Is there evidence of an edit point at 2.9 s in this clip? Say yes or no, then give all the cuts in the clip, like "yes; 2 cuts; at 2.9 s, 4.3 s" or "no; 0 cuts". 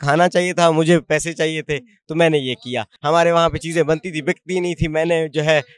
yes; 1 cut; at 2.9 s